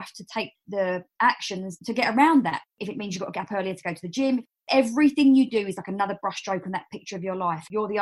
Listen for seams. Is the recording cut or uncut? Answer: cut